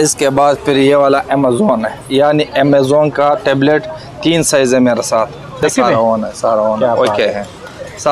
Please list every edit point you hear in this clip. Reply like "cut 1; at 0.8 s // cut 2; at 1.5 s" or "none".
cut 1; at 5.6 s